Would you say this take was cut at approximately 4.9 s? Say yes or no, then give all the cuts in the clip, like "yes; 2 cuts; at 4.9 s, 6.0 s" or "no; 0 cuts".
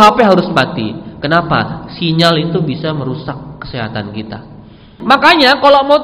yes; 1 cut; at 4.9 s